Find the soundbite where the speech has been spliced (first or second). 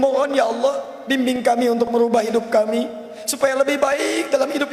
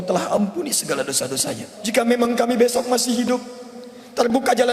second